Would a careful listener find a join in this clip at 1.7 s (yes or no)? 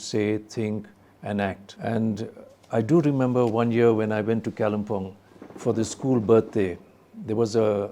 yes